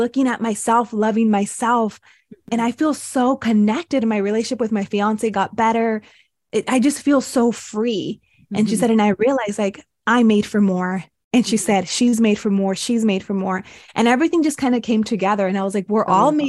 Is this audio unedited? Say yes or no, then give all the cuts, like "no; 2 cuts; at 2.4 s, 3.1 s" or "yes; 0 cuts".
yes; 0 cuts